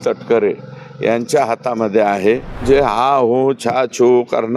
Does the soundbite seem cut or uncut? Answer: cut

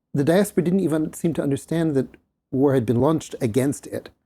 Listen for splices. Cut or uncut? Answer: cut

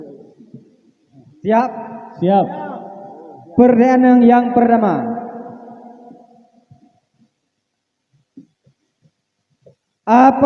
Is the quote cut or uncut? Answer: uncut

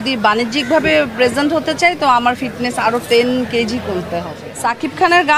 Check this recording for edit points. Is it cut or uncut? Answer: cut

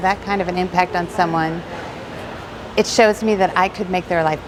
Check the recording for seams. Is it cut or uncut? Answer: uncut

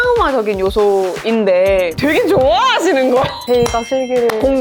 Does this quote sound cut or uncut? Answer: cut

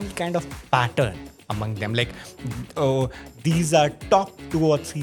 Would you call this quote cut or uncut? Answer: uncut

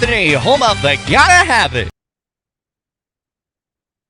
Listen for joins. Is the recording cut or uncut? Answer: uncut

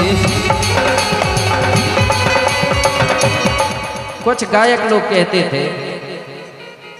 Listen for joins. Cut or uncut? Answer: cut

